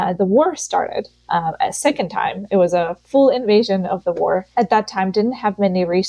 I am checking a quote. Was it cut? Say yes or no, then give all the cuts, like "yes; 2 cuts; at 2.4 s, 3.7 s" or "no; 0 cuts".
yes; 2 cuts; at 1.2 s, 4.5 s